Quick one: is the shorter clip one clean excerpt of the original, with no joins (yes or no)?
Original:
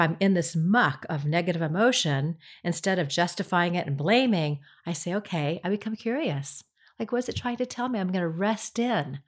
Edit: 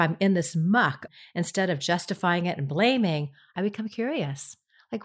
no